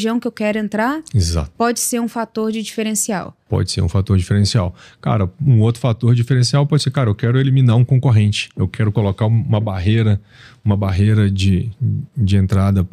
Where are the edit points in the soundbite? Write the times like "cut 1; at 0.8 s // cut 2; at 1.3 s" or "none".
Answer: none